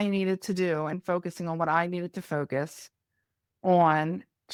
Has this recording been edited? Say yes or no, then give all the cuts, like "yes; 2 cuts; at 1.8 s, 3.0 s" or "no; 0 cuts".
no; 0 cuts